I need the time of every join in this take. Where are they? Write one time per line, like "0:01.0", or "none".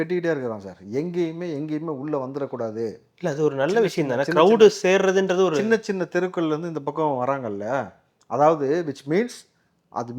none